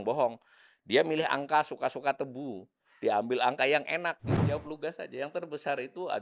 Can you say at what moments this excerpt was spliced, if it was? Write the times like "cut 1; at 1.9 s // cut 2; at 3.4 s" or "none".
cut 1; at 4.4 s